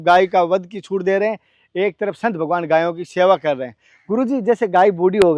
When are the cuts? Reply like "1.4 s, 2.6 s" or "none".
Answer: none